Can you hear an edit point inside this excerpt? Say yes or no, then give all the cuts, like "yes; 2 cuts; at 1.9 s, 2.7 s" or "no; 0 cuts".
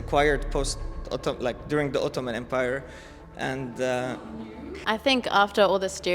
yes; 1 cut; at 4.7 s